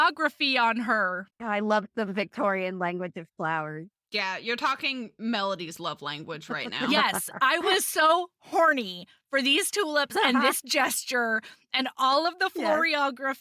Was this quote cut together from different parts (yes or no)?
yes